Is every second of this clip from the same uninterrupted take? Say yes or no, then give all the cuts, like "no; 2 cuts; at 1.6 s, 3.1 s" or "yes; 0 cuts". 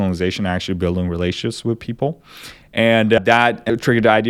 no; 1 cut; at 3.2 s